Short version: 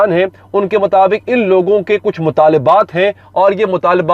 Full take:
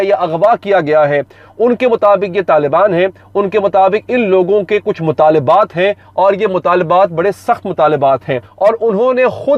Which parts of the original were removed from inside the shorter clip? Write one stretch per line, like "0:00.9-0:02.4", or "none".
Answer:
none